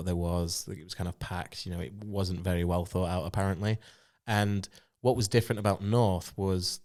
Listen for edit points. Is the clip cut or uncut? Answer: uncut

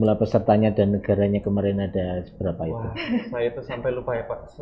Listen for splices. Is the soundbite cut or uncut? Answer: uncut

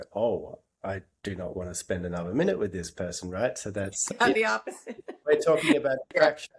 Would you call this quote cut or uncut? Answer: uncut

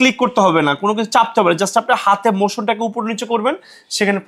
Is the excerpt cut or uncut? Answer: uncut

